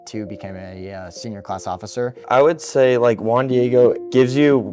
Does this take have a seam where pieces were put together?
yes; 1 cut; at 2.2 s

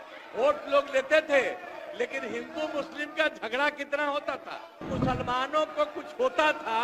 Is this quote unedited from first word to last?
no; 1 cut; at 4.9 s

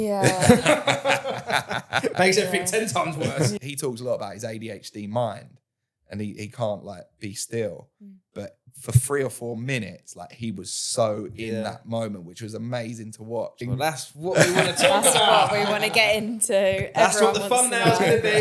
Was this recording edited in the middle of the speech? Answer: yes; 2 cuts; at 3.6 s, 13.6 s

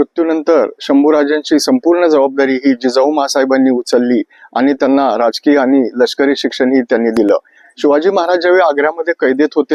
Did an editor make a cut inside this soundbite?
no; 0 cuts

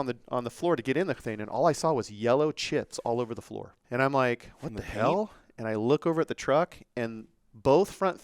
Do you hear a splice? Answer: yes; 1 cut; at 3.8 s

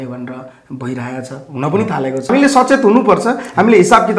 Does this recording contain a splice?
yes; 1 cut; at 2.3 s

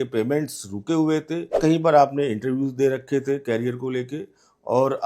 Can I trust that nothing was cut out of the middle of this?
no; 1 cut; at 1.6 s

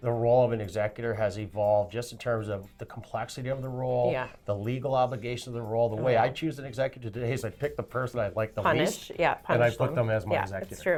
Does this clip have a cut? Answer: no; 0 cuts

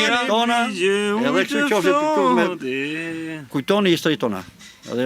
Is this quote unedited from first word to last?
no; 1 cut; at 3.5 s

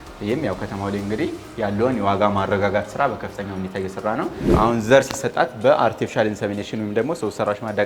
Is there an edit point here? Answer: yes; 1 cut; at 4.4 s

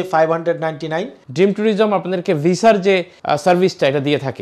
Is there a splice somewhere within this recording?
yes; 2 cuts; at 1.2 s, 3.1 s

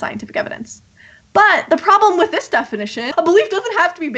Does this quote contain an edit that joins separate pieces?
yes; 1 cut; at 3.0 s

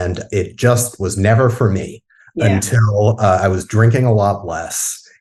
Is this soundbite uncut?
yes; 0 cuts

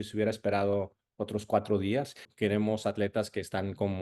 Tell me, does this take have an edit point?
yes; 1 cut; at 2.3 s

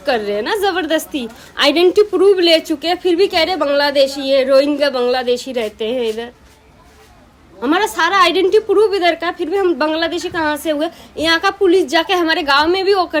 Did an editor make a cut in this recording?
no; 0 cuts

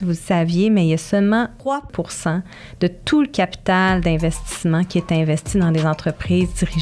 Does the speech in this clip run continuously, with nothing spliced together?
no; 1 cut; at 1.8 s

